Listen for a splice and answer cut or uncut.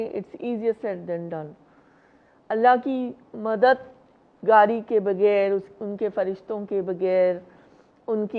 uncut